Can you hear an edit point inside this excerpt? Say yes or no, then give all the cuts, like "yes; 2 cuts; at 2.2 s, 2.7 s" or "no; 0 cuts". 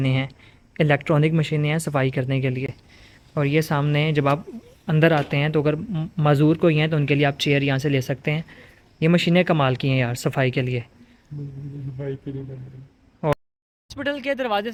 no; 0 cuts